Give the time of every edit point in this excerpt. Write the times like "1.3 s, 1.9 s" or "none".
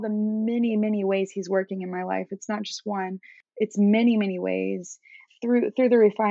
3.4 s, 5.2 s